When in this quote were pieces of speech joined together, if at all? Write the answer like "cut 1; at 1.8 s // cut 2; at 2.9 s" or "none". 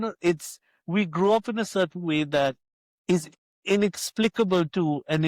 none